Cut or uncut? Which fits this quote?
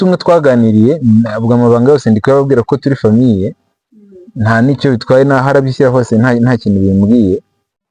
uncut